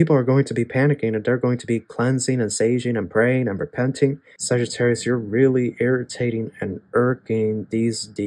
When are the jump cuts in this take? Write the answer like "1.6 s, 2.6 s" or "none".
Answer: 4.3 s